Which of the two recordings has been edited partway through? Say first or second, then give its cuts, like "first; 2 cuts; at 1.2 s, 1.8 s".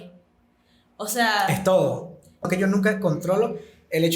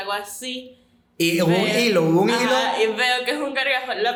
first; 1 cut; at 2.5 s